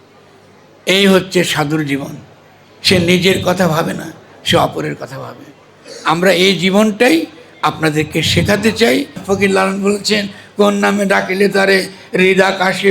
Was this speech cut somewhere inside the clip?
yes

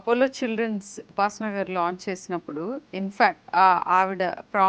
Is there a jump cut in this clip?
yes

